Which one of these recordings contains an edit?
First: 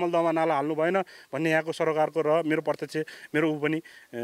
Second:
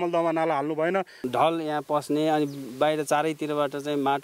second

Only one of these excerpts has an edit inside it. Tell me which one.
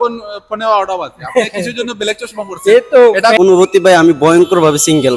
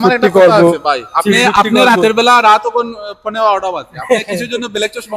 first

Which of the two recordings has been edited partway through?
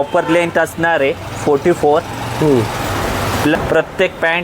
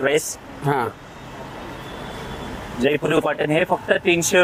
first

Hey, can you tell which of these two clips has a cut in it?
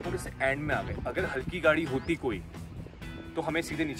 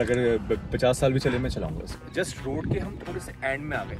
second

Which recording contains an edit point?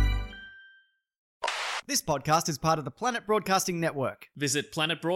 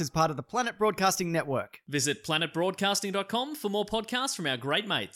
first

